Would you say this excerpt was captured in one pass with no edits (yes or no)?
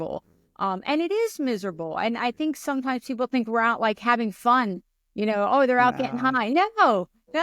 yes